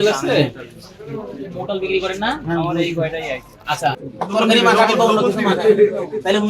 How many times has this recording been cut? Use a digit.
1